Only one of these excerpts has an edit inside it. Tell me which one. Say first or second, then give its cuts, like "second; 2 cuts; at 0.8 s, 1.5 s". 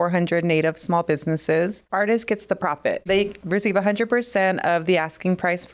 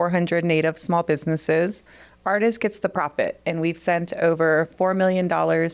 first; 2 cuts; at 1.8 s, 3.1 s